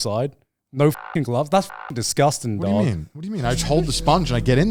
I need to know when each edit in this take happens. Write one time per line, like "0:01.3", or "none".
none